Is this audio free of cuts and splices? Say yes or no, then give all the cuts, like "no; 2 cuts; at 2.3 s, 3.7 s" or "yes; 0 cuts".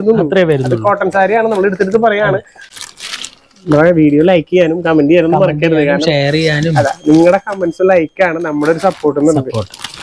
yes; 0 cuts